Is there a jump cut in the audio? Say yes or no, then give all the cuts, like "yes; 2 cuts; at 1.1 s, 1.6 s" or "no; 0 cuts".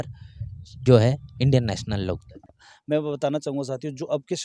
yes; 1 cut; at 2.5 s